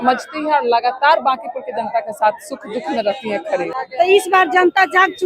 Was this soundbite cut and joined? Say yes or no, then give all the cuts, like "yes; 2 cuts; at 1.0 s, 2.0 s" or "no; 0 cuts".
yes; 1 cut; at 3.7 s